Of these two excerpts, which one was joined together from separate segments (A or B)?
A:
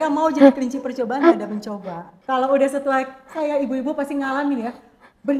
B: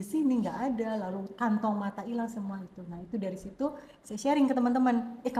A